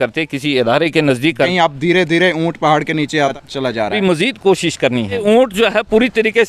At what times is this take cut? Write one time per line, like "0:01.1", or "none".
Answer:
0:01.5
0:03.9
0:05.2